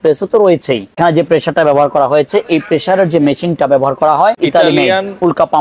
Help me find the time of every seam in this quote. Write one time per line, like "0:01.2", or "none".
0:01.0
0:04.4